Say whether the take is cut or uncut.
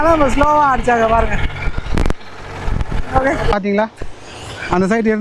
cut